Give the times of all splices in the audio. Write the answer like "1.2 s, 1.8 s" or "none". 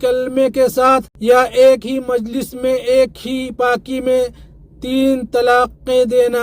1.1 s